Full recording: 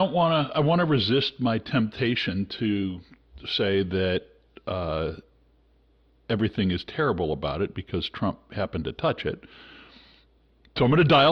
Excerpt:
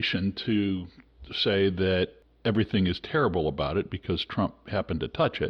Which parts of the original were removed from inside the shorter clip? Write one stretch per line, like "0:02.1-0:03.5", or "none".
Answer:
0:04.4-0:06.1